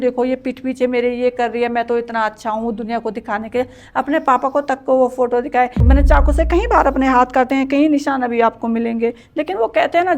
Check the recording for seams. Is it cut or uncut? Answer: cut